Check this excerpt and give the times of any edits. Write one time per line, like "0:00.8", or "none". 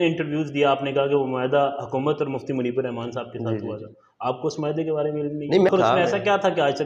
0:05.7

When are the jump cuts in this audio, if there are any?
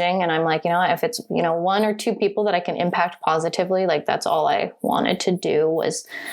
none

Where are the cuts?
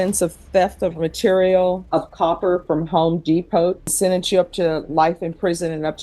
0:01.8
0:03.9

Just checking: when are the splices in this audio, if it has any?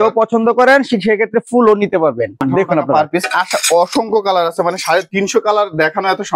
0:02.4

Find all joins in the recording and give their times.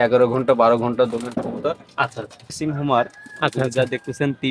0:02.6

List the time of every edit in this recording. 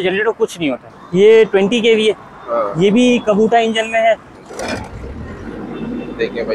0:00.9
0:04.4

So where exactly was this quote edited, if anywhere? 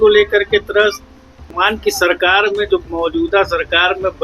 0:01.5

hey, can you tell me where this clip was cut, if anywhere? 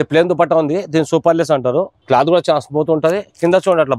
0:02.0

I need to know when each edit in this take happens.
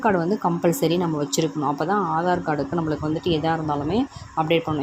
none

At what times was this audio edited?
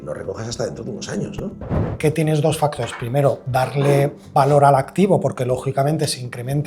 0:01.9

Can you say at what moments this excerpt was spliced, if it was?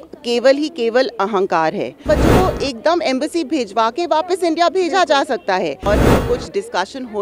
0:02.1
0:05.9

